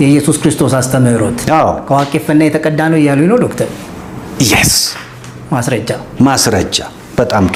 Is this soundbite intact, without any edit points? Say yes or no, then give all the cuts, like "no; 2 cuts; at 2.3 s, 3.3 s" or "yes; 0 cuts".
yes; 0 cuts